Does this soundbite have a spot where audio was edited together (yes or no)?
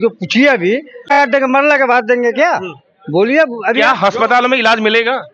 yes